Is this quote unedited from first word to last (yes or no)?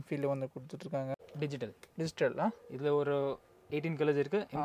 no